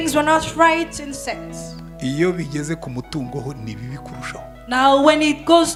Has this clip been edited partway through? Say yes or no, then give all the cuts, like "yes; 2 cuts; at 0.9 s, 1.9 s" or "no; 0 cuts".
no; 0 cuts